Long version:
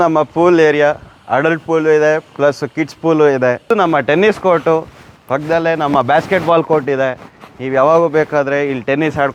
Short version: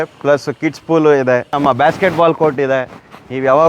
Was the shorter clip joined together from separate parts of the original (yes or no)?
yes